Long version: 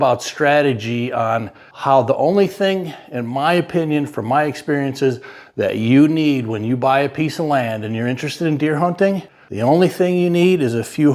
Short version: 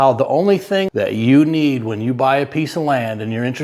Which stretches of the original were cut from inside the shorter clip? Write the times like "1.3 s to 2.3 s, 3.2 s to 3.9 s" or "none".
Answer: 2.8 s to 5.5 s